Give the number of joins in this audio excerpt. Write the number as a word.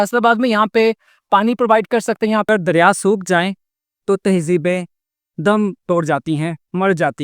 one